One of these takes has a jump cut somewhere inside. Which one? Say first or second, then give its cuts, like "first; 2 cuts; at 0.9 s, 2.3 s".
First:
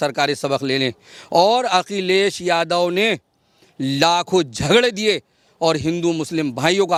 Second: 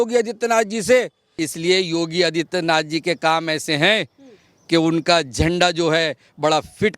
second; 1 cut; at 1.3 s